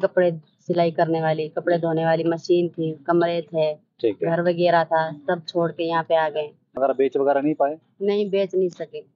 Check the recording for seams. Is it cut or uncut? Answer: uncut